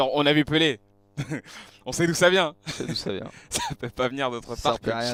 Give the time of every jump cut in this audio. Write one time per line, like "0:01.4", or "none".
none

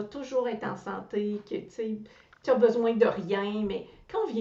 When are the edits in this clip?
none

